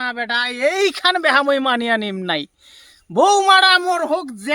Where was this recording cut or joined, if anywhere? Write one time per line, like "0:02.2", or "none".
none